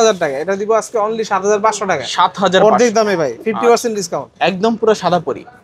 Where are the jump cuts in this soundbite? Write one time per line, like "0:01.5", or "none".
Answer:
none